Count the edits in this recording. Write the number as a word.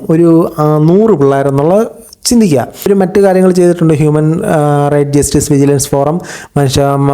one